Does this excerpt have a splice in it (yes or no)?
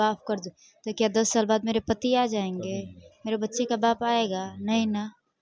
no